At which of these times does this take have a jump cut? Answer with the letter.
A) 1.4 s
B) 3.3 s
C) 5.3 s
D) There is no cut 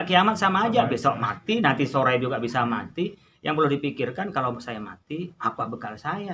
D